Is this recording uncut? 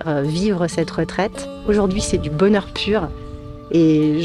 no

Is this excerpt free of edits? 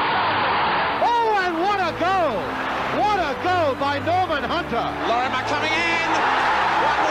no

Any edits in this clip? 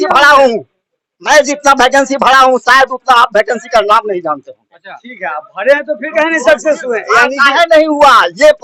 no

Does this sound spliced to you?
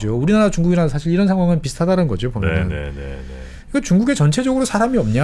no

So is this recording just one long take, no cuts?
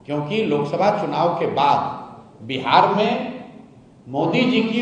yes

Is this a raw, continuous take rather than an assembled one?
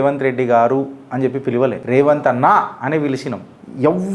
no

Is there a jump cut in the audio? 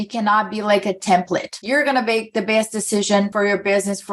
yes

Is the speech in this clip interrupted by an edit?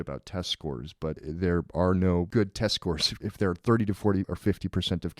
yes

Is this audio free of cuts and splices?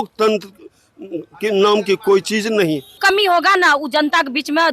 no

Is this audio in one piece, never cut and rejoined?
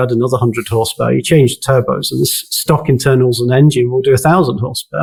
yes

